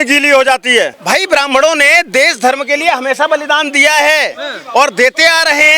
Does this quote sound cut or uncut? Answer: cut